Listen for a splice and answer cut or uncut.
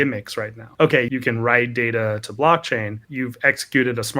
cut